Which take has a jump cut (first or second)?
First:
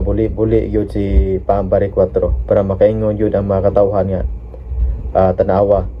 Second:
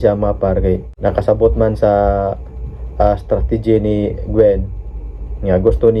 second